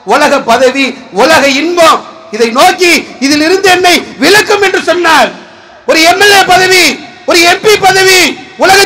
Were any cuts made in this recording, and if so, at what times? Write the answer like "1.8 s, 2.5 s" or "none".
none